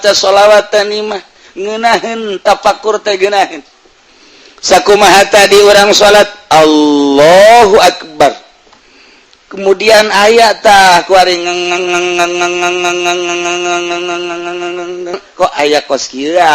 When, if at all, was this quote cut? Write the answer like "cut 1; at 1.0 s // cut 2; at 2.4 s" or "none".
cut 1; at 15.2 s